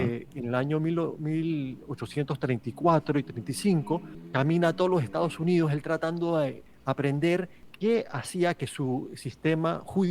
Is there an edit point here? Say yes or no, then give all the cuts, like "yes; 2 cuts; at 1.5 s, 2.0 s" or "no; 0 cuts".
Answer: yes; 3 cuts; at 4.2 s, 6.7 s, 7.6 s